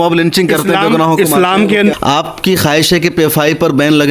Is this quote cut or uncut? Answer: cut